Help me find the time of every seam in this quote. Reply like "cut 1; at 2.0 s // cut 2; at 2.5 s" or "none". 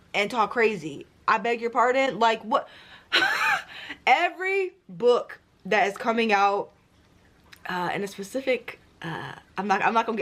none